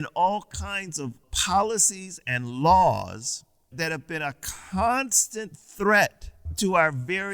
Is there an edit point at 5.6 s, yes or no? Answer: no